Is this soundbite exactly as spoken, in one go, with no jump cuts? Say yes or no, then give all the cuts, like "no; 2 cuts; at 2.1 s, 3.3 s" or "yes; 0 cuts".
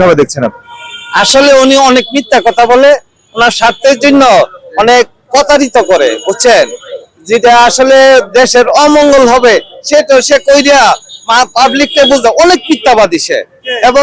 yes; 0 cuts